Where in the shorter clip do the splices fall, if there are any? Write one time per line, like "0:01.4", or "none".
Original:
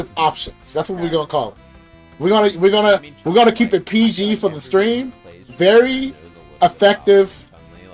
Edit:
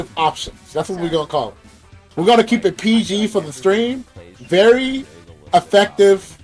0:02.1